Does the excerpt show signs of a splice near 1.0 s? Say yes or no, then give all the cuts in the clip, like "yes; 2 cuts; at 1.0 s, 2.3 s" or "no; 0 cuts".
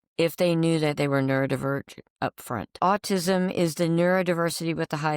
no; 1 cut; at 2.8 s